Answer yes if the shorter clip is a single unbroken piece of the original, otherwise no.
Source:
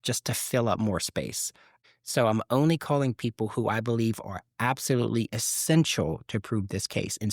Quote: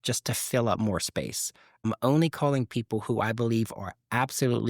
no